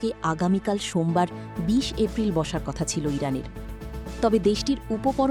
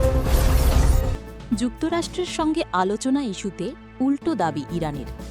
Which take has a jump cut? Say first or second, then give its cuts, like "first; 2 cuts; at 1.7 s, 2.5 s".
second; 1 cut; at 1.4 s